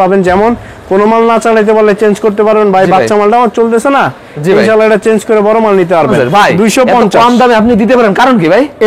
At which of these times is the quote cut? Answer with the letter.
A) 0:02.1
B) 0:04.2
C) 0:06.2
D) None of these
C